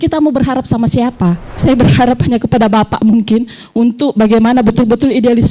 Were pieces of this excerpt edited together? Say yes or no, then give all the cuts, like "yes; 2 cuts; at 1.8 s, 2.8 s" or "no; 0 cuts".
yes; 1 cut; at 1.5 s